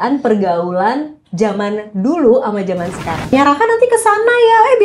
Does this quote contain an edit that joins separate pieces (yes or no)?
yes